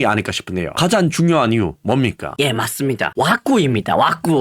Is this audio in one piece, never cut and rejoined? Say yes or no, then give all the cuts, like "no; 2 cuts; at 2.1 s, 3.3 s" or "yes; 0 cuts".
no; 1 cut; at 2.2 s